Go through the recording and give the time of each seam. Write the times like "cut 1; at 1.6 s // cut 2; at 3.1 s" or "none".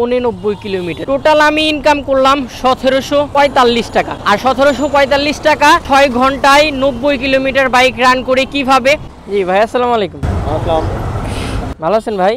cut 1; at 1.0 s // cut 2; at 3.3 s // cut 3; at 4.2 s // cut 4; at 5.8 s // cut 5; at 9.2 s

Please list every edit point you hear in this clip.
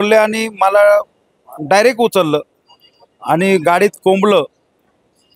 none

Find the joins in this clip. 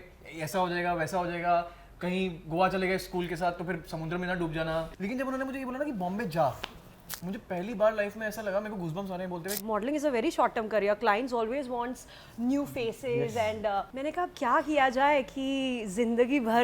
cut 1; at 4.9 s // cut 2; at 9.6 s // cut 3; at 13.9 s

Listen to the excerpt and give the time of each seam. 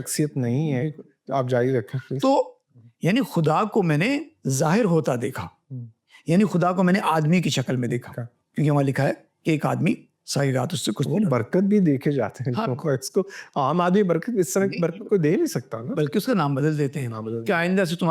cut 1; at 2.6 s

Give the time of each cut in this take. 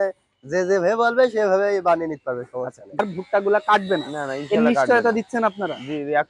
cut 1; at 3.0 s

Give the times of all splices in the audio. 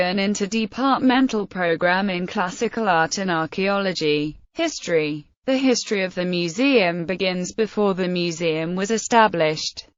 cut 1; at 2.5 s

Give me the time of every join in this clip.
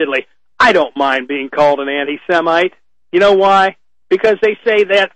none

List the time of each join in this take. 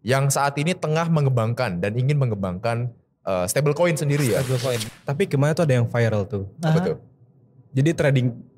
cut 1; at 4.9 s

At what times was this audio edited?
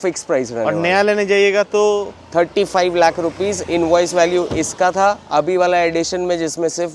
none

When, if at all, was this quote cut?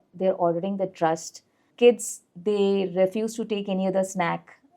cut 1; at 1.7 s

